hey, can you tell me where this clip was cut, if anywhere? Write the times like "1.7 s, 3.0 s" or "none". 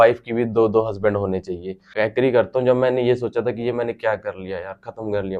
1.9 s